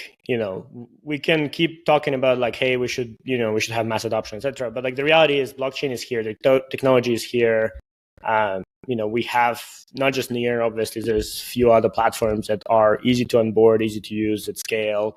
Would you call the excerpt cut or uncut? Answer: uncut